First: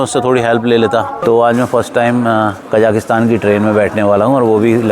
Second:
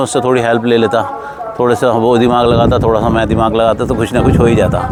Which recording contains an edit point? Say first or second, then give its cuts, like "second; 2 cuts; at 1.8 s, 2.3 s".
first; 1 cut; at 1.1 s